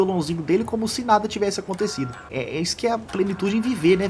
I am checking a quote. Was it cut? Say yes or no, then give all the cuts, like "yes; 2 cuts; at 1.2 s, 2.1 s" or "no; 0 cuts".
yes; 1 cut; at 2.2 s